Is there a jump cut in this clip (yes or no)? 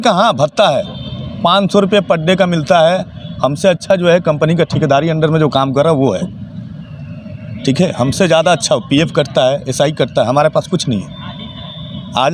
no